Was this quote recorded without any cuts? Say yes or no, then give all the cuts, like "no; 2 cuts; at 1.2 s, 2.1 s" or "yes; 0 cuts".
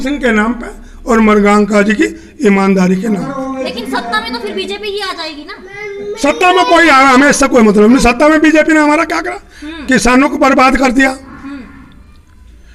yes; 0 cuts